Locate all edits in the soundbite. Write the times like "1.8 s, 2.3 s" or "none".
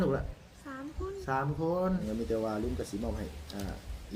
2.0 s